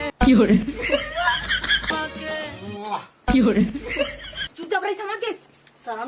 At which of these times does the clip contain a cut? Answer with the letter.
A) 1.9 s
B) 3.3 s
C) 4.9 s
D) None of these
A